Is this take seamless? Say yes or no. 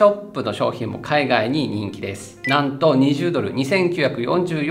no